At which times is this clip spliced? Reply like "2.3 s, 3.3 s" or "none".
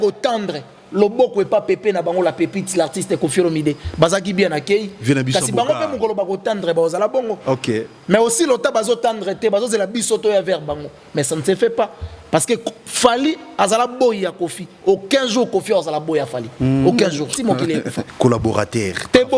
18.0 s